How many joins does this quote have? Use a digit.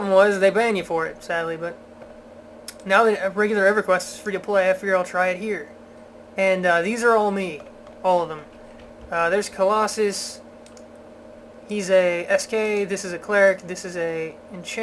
0